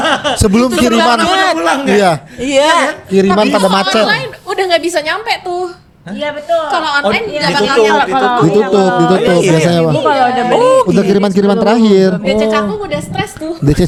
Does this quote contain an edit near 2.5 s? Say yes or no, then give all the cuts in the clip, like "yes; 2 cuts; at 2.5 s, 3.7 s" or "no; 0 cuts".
no; 0 cuts